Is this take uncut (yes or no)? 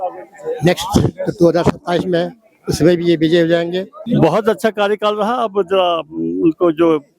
no